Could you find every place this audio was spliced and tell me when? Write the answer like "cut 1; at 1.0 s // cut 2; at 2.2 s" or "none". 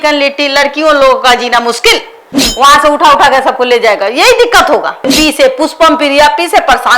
cut 1; at 5.1 s